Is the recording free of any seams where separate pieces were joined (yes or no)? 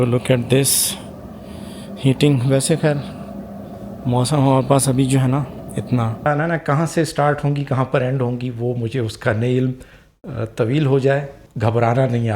no